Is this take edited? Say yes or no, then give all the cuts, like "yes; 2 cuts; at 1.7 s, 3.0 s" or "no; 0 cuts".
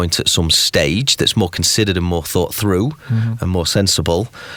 no; 0 cuts